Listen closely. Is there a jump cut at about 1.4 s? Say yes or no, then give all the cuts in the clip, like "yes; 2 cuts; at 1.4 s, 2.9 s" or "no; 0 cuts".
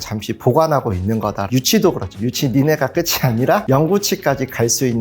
yes; 1 cut; at 1.4 s